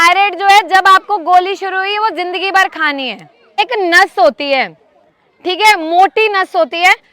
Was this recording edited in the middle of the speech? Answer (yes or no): yes